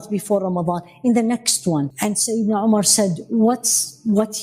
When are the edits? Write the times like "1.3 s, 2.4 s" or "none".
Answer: 1.9 s